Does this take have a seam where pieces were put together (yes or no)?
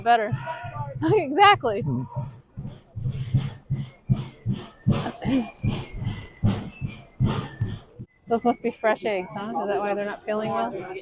yes